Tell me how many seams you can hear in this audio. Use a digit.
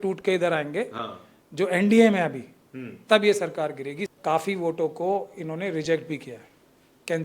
1